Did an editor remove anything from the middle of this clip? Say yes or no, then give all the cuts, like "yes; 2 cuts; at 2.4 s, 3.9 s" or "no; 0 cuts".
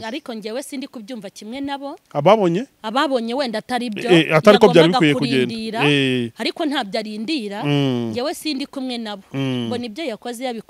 no; 0 cuts